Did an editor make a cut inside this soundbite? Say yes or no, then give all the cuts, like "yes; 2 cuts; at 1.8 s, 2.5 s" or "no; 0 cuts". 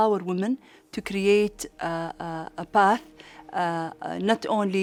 no; 0 cuts